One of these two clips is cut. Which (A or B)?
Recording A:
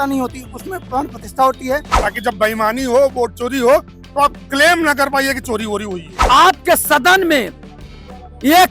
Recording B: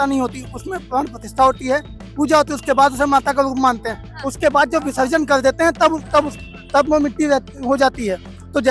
A